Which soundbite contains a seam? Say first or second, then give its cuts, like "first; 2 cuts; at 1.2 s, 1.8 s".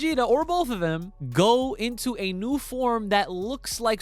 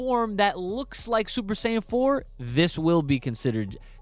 first; 1 cut; at 1.1 s